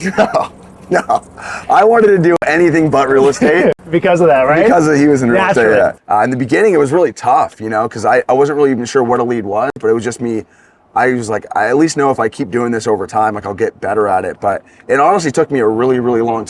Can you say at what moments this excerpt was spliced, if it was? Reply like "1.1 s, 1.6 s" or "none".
6.0 s